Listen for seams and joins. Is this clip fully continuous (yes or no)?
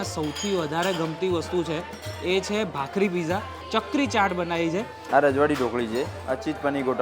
no